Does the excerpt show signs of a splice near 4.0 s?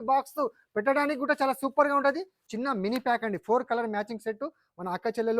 no; 1 cut; at 2.3 s

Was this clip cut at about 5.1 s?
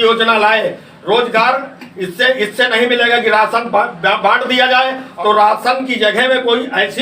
yes; 1 cut; at 5.1 s

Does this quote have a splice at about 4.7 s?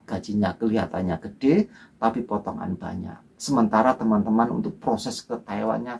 no; 0 cuts

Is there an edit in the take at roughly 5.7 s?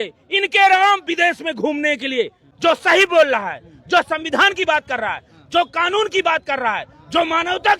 no; 1 cut; at 2.4 s

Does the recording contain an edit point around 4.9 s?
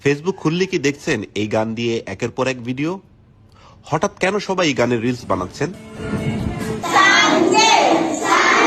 no; 0 cuts

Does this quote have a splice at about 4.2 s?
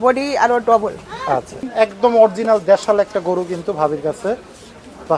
no; 1 cut; at 1.7 s

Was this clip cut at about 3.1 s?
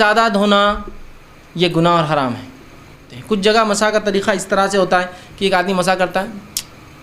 yes; 1 cut; at 3.1 s

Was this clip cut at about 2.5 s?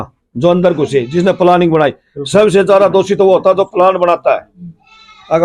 no; 0 cuts

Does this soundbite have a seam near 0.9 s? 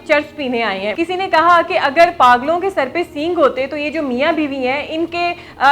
yes; 1 cut; at 0.9 s

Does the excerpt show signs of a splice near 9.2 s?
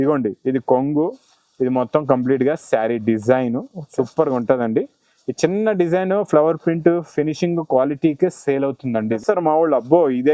yes; 1 cut; at 9.2 s

